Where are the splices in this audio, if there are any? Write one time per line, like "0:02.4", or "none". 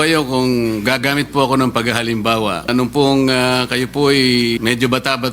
0:02.7
0:04.6